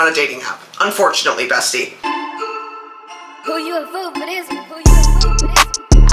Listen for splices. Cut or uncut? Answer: cut